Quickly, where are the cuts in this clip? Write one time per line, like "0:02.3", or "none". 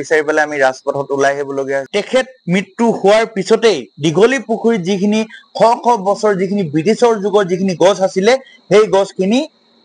0:01.8